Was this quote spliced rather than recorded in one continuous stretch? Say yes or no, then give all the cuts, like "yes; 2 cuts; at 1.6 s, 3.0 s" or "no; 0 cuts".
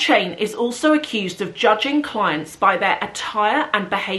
no; 0 cuts